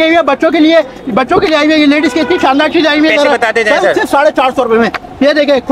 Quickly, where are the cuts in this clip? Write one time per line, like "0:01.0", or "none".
none